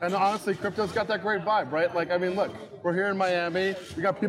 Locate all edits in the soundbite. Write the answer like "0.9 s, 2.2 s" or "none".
none

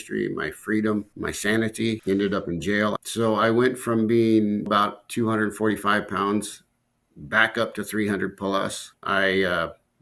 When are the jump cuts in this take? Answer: 1.1 s, 2.0 s, 3.0 s, 4.7 s, 8.9 s

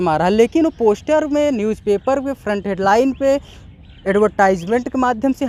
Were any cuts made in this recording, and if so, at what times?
none

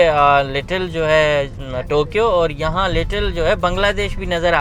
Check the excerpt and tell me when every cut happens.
none

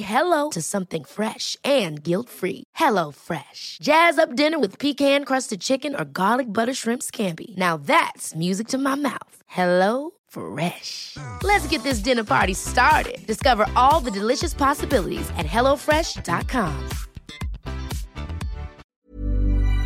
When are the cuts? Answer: 18.9 s

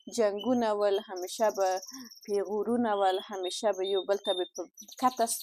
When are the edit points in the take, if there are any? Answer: none

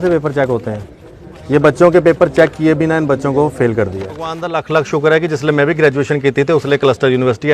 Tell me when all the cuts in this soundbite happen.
4.5 s

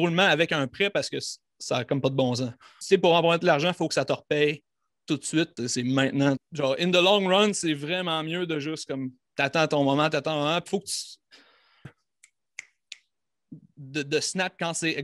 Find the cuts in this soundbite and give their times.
2.7 s, 5.5 s, 6.5 s

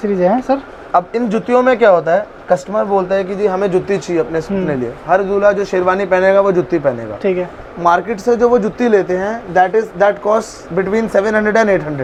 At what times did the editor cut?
none

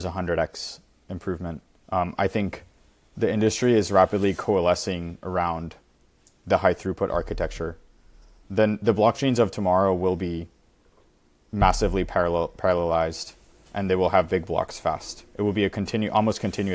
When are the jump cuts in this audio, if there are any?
none

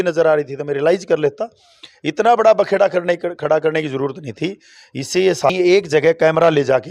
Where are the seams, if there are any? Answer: 5.5 s

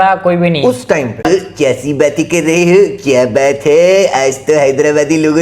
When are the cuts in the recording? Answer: 1.2 s

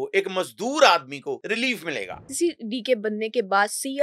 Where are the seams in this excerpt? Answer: 1.4 s, 2.2 s

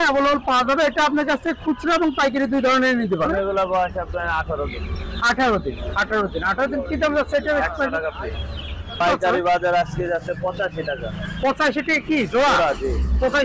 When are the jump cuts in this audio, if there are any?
3.3 s, 9.0 s

